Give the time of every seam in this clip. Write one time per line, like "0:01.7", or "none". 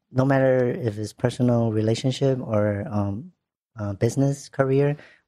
none